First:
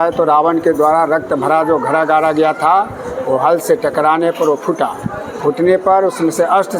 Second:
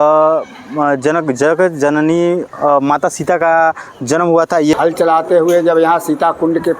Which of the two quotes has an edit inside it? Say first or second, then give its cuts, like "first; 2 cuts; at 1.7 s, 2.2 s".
second; 1 cut; at 4.7 s